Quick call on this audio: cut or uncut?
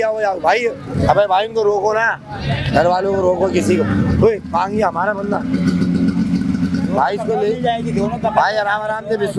uncut